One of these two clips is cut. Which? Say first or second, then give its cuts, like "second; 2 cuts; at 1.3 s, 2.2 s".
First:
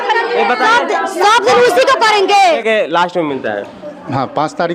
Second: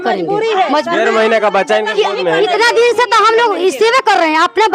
first; 1 cut; at 2.6 s